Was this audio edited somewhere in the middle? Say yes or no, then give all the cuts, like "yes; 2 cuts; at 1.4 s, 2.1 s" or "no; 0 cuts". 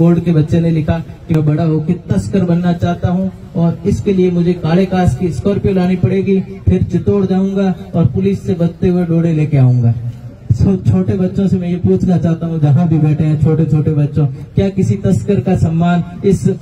yes; 1 cut; at 1.4 s